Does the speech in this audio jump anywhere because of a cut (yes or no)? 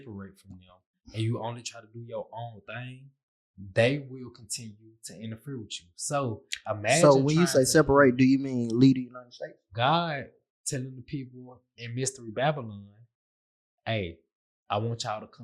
yes